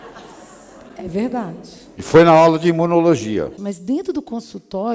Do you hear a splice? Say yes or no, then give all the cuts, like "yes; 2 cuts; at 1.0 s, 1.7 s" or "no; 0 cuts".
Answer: yes; 1 cut; at 3.6 s